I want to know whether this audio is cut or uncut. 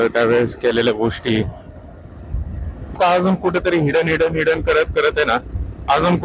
cut